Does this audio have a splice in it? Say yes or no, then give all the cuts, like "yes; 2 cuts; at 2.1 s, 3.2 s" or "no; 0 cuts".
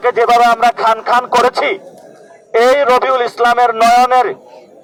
no; 0 cuts